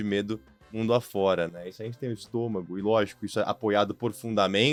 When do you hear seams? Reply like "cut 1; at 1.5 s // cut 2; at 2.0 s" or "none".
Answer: none